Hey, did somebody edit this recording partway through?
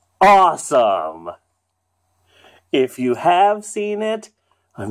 no; 0 cuts

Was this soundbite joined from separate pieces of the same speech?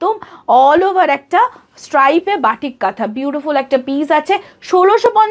no; 0 cuts

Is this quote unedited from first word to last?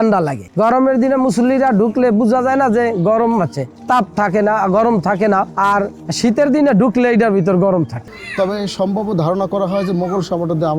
no; 1 cut; at 8.1 s

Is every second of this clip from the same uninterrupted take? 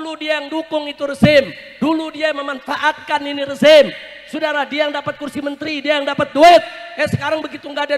yes; 0 cuts

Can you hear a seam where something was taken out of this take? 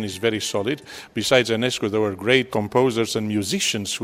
yes; 1 cut; at 2.5 s

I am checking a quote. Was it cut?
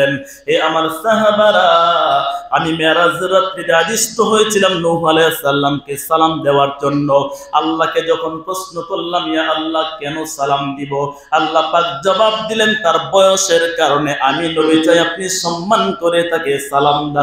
no; 0 cuts

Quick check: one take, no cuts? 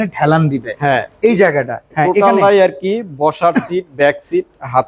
no; 1 cut; at 1.8 s

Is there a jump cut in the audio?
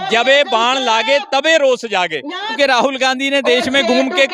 yes; 1 cut; at 2.6 s

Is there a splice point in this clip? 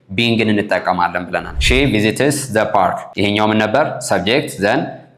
yes; 2 cuts; at 1.5 s, 3.1 s

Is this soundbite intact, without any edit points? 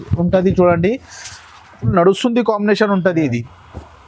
no; 1 cut; at 1.8 s

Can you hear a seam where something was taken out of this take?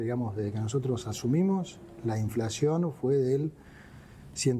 no; 0 cuts

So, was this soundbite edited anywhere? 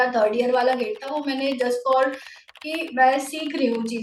no; 0 cuts

